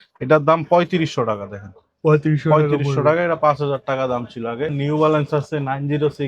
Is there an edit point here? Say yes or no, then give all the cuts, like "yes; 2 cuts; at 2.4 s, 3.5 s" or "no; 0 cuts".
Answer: yes; 1 cut; at 4.8 s